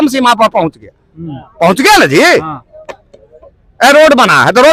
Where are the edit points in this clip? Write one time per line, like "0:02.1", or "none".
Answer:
none

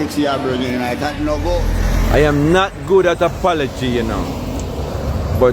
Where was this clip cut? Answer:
0:01.7

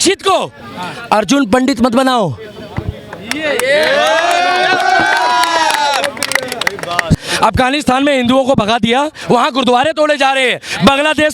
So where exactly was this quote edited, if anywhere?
0:07.2
0:09.2

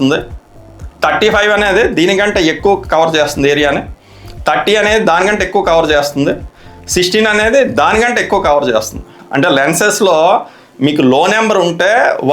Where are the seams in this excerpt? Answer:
none

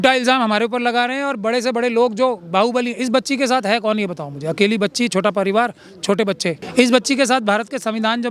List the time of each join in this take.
0:06.6

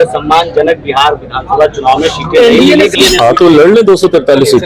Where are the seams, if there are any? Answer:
0:02.9

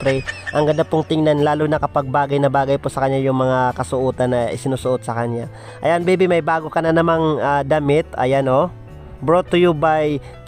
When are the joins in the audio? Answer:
none

